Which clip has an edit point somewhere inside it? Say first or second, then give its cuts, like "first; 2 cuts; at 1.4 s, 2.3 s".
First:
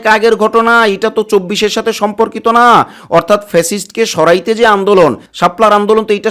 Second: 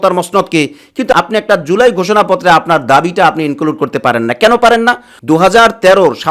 second; 1 cut; at 5.1 s